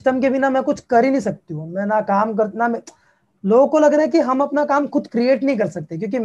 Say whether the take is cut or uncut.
uncut